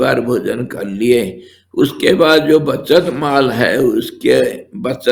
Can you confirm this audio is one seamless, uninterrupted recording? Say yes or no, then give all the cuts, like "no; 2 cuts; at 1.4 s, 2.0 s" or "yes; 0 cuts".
yes; 0 cuts